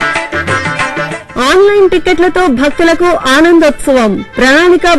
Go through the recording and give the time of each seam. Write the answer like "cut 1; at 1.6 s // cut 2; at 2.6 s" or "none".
none